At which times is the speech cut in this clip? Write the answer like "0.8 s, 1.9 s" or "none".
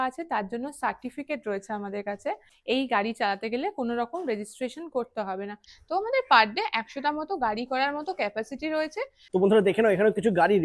2.5 s, 5.7 s, 9.2 s

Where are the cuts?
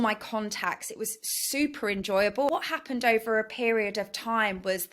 2.5 s

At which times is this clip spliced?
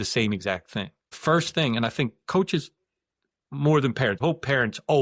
1.0 s, 4.2 s

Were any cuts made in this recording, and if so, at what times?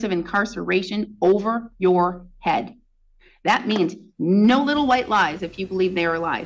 none

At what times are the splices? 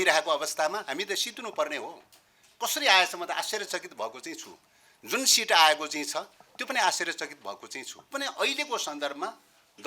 8.0 s

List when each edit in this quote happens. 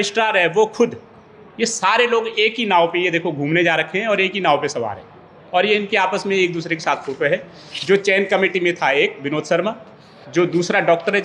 none

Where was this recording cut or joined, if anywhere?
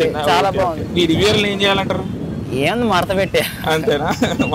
none

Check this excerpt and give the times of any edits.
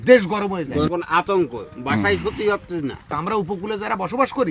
0.9 s, 3.1 s

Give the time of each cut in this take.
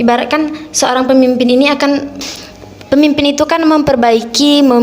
2.1 s

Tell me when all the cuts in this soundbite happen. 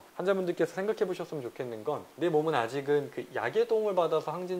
2.1 s

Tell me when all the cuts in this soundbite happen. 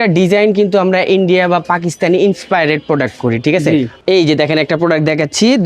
3.9 s

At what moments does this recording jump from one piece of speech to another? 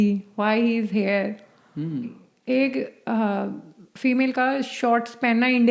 2.3 s

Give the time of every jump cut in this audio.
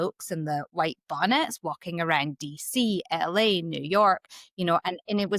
none

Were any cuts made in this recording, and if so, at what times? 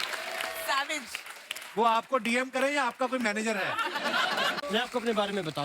4.6 s

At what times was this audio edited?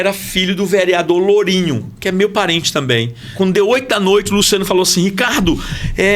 3.3 s

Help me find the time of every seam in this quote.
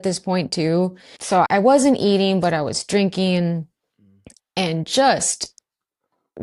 1.4 s

